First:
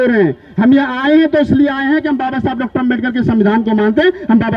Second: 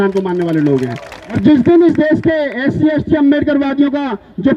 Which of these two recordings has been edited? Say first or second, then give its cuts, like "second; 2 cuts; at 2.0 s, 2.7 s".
second; 1 cut; at 1.4 s